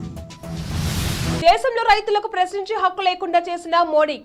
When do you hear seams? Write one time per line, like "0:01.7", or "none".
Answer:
0:01.4